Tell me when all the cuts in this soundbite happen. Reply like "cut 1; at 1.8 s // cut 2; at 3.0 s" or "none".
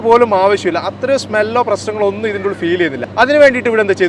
cut 1; at 3.0 s